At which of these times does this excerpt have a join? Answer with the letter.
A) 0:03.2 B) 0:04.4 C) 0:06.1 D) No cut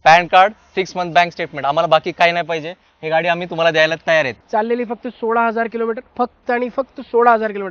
B